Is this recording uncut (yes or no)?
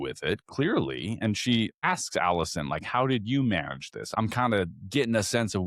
no